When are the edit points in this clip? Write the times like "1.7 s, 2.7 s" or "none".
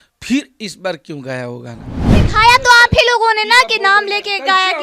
2.1 s